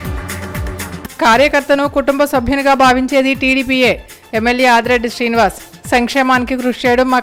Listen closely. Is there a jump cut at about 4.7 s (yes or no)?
no